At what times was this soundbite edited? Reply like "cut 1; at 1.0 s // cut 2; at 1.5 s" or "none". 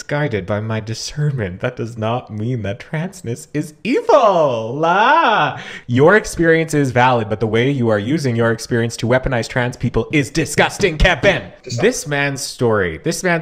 cut 1; at 5.7 s // cut 2; at 11.6 s